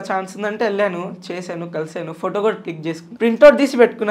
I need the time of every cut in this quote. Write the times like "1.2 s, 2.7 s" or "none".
3.1 s